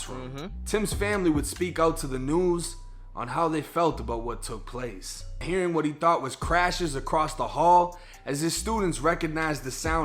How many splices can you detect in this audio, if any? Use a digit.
1